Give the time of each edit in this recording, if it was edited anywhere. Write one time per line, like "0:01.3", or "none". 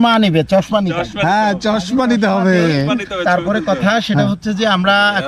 none